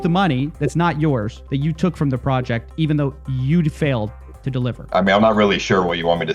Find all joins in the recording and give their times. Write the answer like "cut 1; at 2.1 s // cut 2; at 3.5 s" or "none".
cut 1; at 1.4 s // cut 2; at 4.8 s